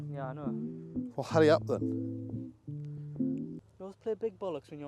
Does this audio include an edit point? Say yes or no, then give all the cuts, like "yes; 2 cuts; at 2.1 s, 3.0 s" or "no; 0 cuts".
no; 0 cuts